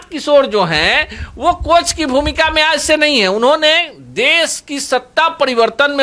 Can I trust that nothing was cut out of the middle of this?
yes; 0 cuts

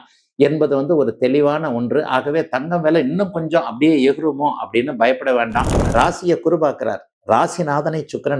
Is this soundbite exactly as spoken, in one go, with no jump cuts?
no; 1 cut; at 5.8 s

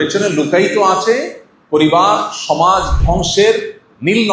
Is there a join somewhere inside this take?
no; 0 cuts

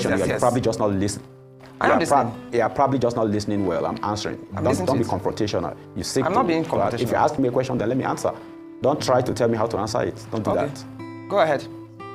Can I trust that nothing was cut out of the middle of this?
yes; 0 cuts

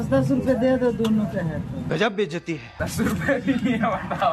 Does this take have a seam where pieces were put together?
yes; 2 cuts; at 1.8 s, 2.7 s

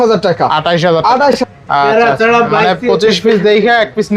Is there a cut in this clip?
yes; 1 cut; at 1.4 s

